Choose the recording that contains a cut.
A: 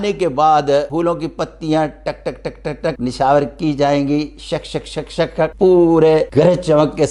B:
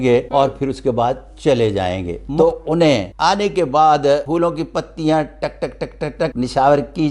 B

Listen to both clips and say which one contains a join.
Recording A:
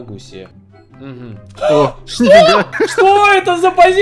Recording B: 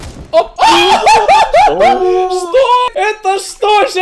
B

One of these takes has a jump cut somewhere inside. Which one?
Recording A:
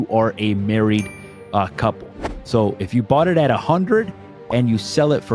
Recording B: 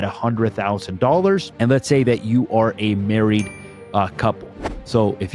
B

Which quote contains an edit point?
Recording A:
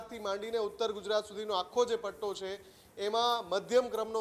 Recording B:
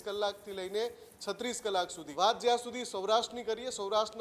B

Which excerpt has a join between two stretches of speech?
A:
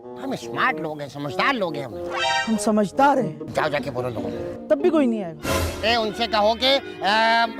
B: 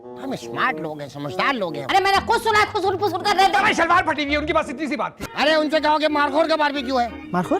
B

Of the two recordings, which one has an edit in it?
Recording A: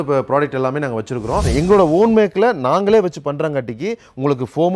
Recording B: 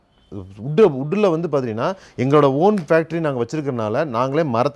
A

